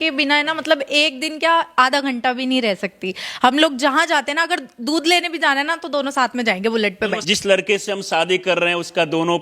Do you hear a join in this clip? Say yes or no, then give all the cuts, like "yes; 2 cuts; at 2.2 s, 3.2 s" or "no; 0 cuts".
yes; 1 cut; at 7.2 s